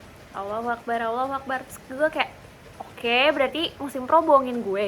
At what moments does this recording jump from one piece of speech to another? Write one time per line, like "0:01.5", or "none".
none